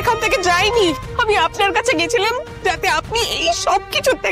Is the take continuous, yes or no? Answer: no